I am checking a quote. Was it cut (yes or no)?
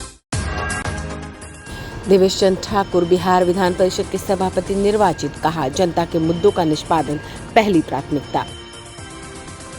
yes